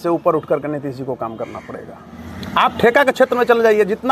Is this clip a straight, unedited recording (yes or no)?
yes